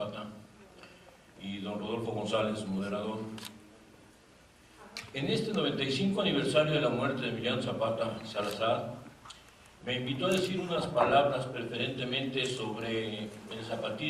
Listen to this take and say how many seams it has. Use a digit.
1